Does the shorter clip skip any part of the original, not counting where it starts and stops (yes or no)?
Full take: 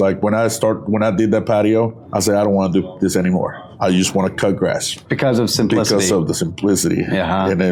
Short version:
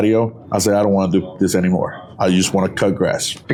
no